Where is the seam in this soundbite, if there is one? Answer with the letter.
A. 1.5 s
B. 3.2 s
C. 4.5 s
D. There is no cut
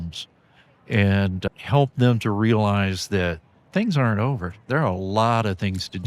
A